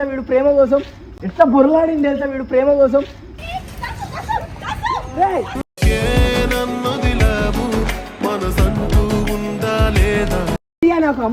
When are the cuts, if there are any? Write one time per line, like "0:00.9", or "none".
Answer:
none

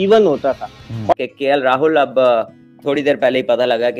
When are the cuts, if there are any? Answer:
0:00.9

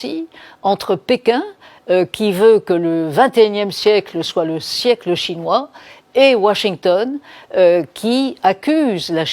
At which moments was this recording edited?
none

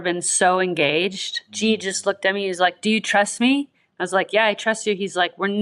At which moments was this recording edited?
0:01.5

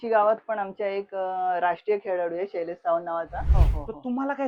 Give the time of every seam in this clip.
0:03.4

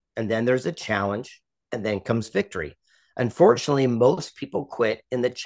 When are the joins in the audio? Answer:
none

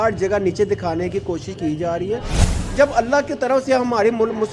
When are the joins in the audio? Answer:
0:02.5

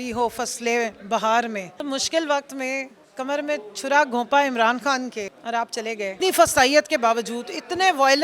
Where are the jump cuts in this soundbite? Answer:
0:01.7
0:05.4
0:06.1

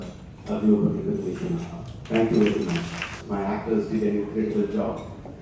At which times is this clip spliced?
0:03.1

